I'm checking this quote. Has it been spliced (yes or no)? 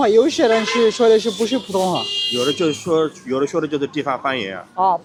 no